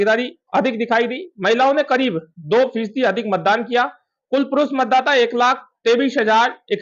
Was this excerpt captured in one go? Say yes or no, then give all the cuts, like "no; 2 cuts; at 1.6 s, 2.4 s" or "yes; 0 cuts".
yes; 0 cuts